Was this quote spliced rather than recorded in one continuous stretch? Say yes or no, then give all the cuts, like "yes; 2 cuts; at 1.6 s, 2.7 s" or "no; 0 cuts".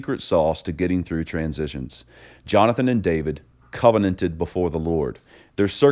no; 0 cuts